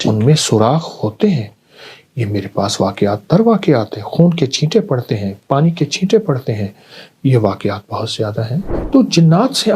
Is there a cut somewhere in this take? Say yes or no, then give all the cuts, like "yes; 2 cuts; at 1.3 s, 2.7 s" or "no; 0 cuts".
yes; 1 cut; at 8.8 s